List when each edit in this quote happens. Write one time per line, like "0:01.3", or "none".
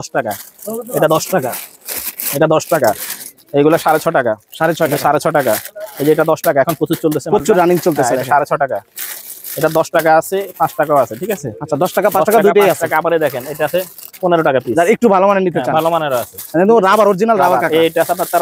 none